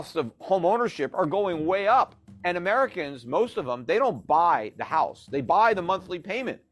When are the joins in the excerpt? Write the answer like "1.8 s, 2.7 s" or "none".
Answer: 2.3 s